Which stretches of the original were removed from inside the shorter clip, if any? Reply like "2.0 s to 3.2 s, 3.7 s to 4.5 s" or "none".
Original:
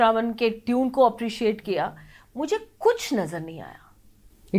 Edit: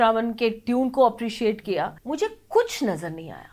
2.0 s to 2.3 s